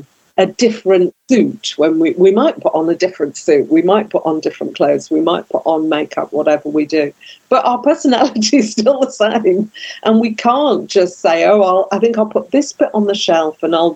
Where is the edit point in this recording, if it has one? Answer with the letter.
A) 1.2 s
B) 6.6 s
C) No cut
A